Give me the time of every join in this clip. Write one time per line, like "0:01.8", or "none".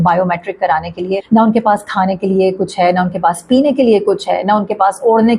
0:01.2